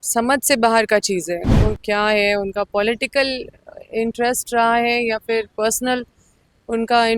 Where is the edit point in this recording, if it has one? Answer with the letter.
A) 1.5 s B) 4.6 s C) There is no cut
A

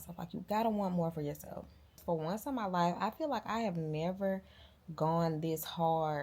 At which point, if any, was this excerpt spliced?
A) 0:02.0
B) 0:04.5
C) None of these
A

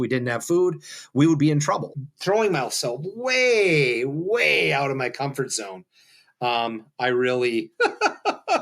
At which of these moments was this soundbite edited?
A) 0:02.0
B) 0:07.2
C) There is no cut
A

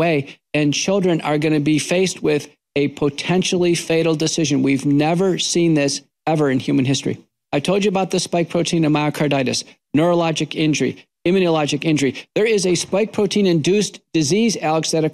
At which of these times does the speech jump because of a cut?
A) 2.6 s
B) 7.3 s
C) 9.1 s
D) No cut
B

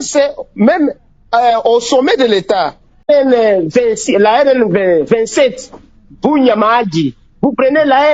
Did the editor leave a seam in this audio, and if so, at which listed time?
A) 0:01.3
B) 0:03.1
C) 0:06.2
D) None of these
B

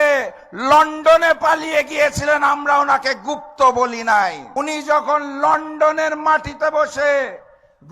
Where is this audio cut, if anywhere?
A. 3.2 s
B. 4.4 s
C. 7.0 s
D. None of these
B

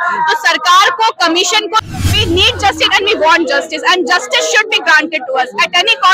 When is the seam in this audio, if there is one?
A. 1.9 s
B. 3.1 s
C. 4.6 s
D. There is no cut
A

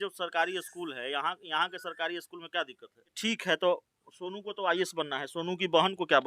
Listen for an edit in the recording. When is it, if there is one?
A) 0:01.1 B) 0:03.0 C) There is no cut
B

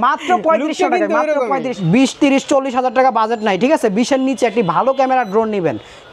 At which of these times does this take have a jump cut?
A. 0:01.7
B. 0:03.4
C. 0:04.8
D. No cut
A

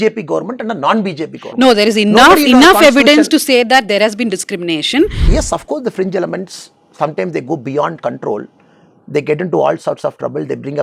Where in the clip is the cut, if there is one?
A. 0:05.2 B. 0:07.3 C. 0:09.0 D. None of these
A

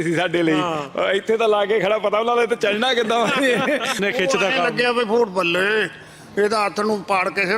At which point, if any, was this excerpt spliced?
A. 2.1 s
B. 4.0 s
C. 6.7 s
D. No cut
B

